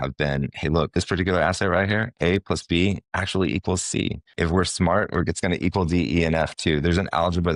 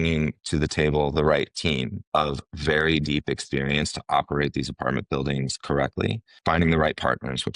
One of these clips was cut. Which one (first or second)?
second